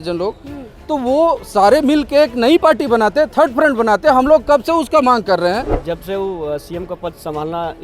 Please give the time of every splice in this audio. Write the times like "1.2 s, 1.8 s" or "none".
5.7 s